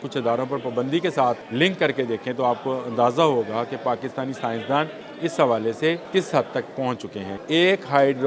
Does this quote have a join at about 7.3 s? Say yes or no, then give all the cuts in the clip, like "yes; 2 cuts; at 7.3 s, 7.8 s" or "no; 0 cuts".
yes; 4 cuts; at 1.4 s, 5.0 s, 6.0 s, 7.3 s